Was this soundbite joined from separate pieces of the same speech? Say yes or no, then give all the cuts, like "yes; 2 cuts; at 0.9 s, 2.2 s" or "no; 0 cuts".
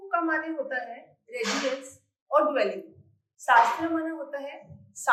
no; 0 cuts